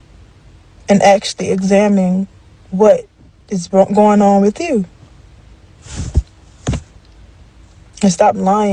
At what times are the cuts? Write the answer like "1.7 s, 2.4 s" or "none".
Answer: 5.8 s